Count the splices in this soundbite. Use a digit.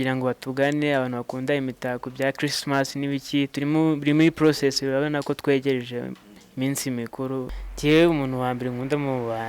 1